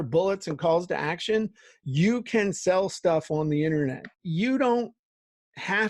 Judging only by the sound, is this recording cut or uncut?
cut